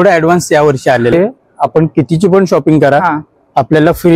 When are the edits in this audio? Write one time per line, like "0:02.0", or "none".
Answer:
0:01.1